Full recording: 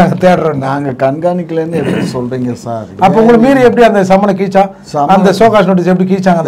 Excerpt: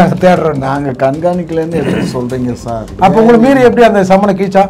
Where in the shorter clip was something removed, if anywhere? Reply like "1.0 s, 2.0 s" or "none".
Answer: none